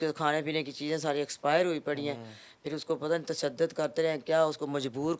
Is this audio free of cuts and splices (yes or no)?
yes